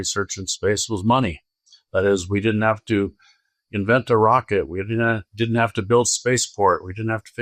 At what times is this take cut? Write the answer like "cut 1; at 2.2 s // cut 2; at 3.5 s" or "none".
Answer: none